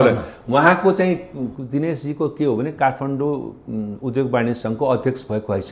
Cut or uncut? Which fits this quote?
uncut